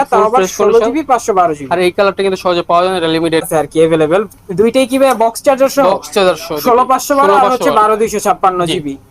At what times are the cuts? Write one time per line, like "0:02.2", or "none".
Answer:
0:03.4

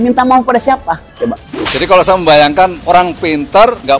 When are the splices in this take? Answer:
0:01.4

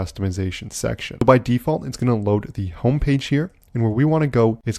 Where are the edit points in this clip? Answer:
0:01.2

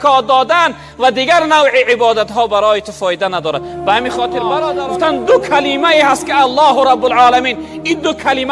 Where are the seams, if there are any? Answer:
0:04.6

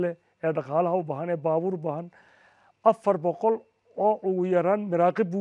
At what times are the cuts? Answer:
none

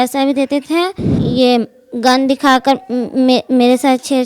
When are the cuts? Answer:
0:01.2

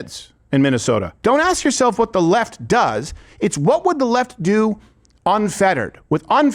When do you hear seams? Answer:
0:01.1

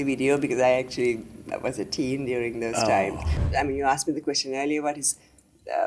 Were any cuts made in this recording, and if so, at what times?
0:03.4

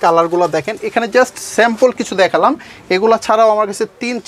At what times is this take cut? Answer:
none

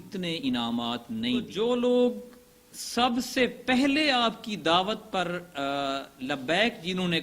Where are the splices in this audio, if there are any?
0:01.5

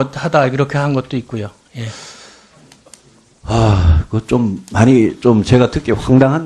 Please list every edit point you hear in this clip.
none

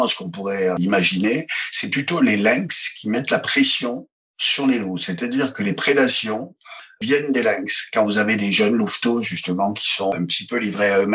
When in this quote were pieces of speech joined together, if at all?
none

